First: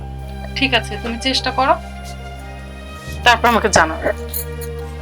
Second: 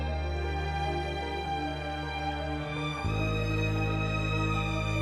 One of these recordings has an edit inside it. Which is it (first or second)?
first